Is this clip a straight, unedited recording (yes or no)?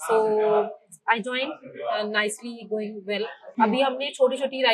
yes